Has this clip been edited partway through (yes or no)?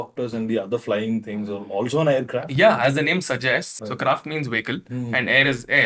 yes